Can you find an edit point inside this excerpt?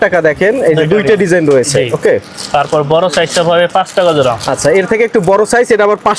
no; 0 cuts

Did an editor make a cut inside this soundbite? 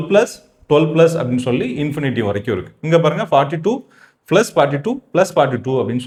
no; 0 cuts

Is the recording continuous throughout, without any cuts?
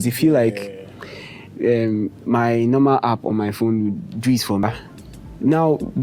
no; 1 cut; at 4.6 s

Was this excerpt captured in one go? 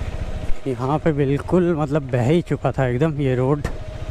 yes; 0 cuts

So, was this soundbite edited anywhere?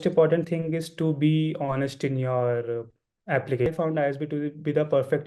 yes; 1 cut; at 3.7 s

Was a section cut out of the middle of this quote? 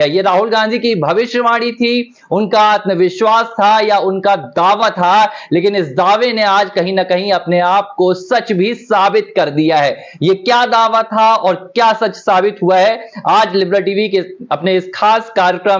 yes; 1 cut; at 3.3 s

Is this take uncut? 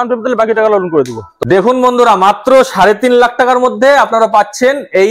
no; 1 cut; at 1.2 s

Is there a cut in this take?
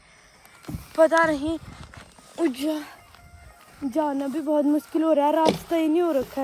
no; 0 cuts

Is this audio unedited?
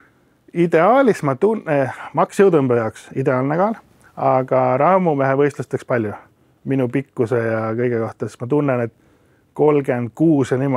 yes; 0 cuts

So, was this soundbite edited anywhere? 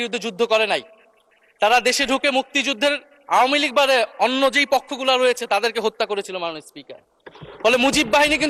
no; 0 cuts

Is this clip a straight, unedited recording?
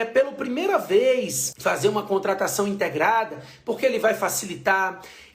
no; 1 cut; at 1.4 s

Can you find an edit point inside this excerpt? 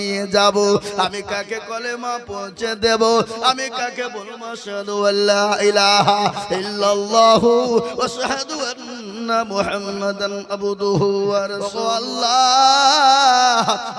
yes; 1 cut; at 11.8 s

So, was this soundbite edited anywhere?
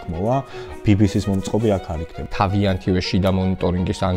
yes; 1 cut; at 2.2 s

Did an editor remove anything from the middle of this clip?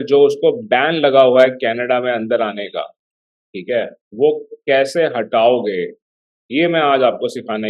no; 0 cuts

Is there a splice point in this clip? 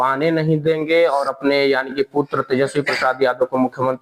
no; 0 cuts

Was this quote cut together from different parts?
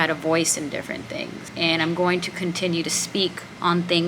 yes; 2 cuts; at 1.4 s, 3.1 s

